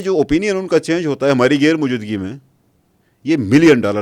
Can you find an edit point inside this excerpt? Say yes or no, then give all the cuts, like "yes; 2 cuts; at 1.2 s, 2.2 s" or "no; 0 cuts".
no; 0 cuts